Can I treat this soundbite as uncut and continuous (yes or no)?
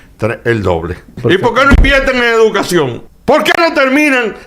no